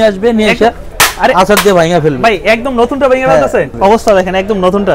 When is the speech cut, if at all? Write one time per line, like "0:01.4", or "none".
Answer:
0:03.7